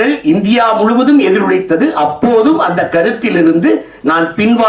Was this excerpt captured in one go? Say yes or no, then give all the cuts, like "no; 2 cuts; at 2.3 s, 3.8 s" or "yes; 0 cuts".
yes; 0 cuts